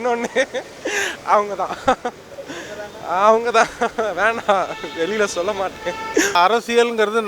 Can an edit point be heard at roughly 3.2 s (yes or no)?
no